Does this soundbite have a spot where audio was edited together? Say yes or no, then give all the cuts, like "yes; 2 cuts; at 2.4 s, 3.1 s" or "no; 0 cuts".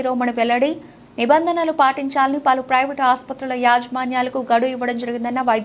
no; 0 cuts